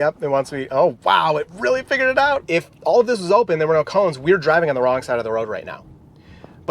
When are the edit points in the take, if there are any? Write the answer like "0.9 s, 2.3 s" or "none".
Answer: 2.4 s